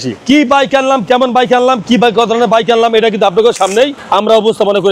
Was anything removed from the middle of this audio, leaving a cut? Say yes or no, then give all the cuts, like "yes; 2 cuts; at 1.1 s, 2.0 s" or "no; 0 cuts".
no; 0 cuts